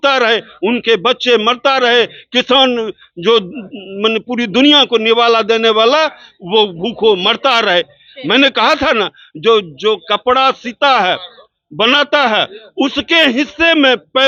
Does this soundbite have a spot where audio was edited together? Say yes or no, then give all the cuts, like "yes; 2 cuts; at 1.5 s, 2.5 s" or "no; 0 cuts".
no; 0 cuts